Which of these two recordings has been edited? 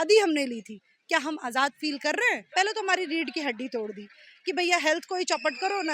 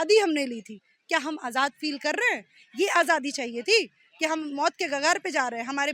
first; 1 cut; at 2.4 s

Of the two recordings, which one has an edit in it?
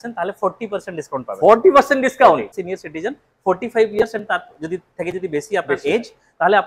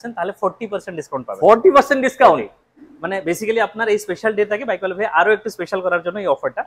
first; 1 cut; at 2.6 s

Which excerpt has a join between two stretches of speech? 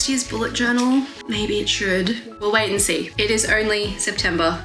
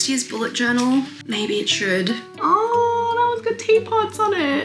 second; 1 cut; at 2.2 s

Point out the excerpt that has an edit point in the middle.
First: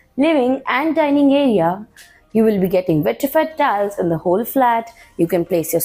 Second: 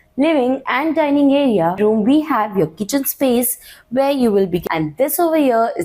second; 2 cuts; at 1.8 s, 4.6 s

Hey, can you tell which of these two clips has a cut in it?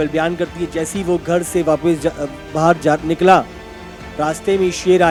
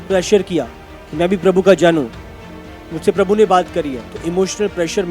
second; 1 cut; at 4.1 s

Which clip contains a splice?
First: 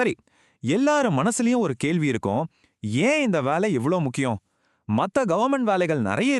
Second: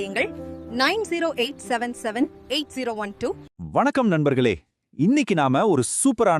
second; 1 cut; at 3.5 s

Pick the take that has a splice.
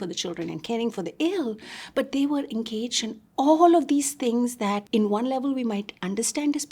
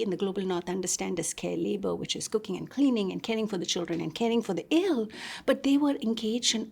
first; 1 cut; at 4.9 s

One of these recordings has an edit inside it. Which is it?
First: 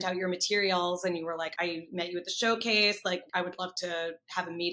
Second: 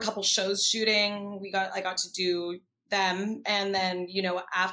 first; 2 cuts; at 1.5 s, 3.3 s

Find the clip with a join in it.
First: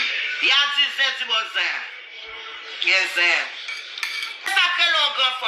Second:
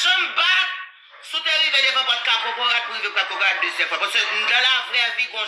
first; 1 cut; at 4.5 s

